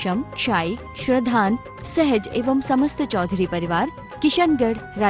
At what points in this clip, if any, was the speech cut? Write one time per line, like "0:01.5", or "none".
none